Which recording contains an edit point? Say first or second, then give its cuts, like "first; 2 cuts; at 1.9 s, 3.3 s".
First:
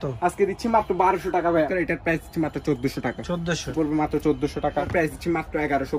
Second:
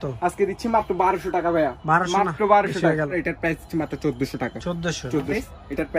first; 3 cuts; at 1.8 s, 3.7 s, 4.9 s